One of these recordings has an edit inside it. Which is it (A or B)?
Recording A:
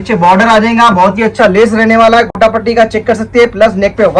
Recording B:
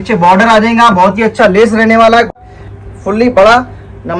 B